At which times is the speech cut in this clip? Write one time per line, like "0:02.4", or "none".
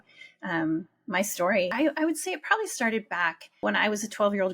0:01.7
0:03.6